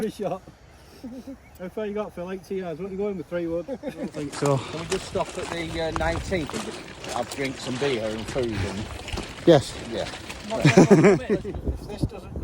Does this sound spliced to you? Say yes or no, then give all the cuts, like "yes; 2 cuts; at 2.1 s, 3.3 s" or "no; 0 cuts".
yes; 2 cuts; at 4.2 s, 11.3 s